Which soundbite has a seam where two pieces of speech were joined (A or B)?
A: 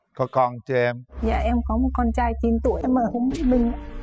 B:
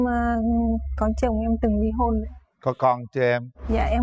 A